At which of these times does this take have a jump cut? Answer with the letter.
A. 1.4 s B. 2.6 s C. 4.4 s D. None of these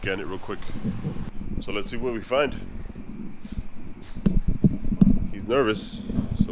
A